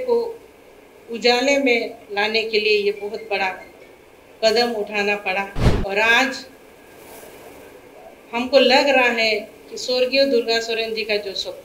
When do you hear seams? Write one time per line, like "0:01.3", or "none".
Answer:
0:05.6